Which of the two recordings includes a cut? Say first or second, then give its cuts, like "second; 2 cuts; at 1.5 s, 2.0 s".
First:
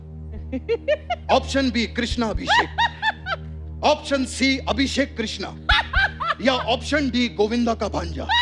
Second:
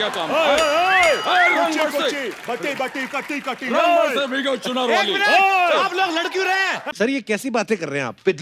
second; 1 cut; at 6.8 s